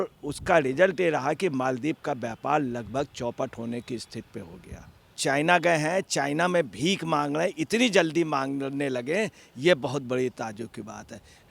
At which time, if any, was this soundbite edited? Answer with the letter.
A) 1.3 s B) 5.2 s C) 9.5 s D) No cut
B